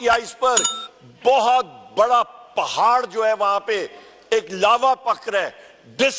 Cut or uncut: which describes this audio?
uncut